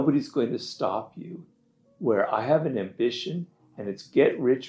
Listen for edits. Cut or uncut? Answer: uncut